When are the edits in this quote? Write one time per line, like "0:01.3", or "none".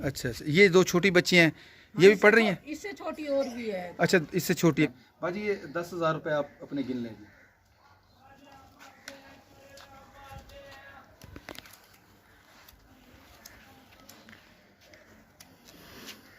0:04.9